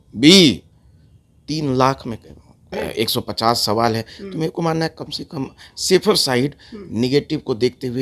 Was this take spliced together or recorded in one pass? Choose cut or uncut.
cut